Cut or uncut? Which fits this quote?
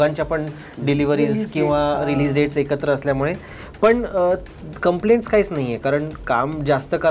uncut